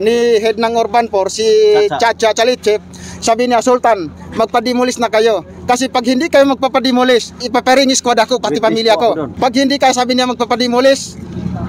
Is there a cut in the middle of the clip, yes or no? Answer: yes